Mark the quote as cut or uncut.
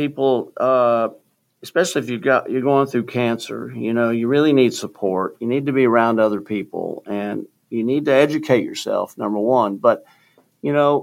uncut